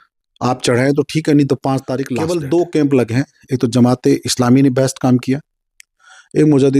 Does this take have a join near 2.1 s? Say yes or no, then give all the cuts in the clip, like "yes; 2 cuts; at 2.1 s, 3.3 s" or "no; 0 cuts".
yes; 1 cut; at 2.1 s